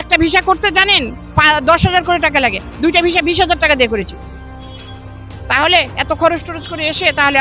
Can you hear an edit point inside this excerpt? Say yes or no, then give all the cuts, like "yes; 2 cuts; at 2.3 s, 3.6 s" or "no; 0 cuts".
no; 0 cuts